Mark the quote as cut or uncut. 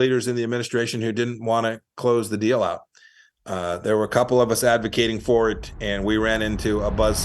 uncut